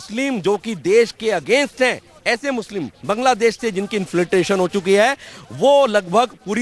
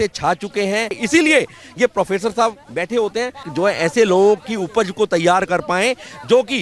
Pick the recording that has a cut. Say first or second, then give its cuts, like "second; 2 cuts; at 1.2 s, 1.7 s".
second; 2 cuts; at 1.0 s, 3.5 s